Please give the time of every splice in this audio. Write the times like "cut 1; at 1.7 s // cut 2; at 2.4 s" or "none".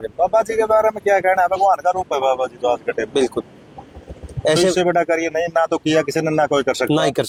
none